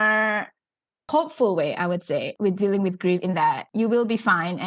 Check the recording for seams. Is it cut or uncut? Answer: cut